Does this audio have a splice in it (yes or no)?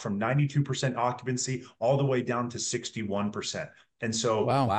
no